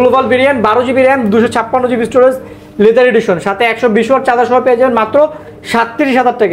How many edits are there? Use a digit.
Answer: 0